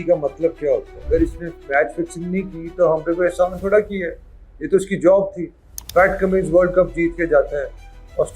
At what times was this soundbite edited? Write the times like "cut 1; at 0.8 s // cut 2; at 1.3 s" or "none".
cut 1; at 0.9 s